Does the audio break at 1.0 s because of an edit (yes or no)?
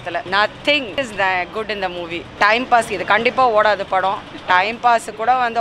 yes